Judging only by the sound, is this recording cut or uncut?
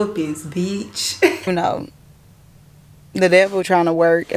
cut